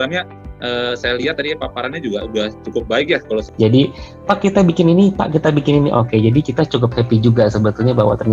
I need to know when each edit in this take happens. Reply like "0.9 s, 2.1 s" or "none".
3.4 s